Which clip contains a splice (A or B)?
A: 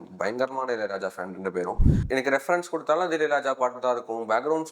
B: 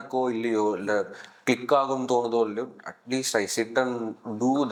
A